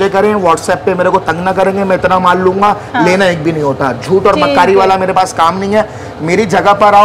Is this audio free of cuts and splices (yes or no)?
yes